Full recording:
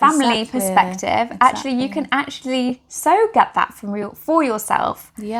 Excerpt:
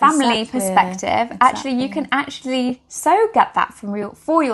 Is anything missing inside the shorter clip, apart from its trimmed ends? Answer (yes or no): no